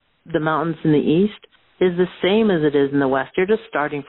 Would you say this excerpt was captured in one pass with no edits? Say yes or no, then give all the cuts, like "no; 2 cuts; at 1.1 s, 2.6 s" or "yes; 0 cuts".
yes; 0 cuts